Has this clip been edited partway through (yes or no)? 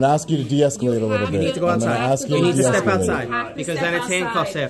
no